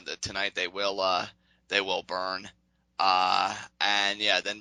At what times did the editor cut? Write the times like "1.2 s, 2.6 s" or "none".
none